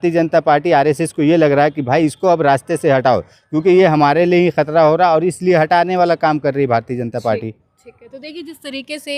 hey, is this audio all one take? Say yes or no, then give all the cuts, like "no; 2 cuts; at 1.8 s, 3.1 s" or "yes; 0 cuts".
yes; 0 cuts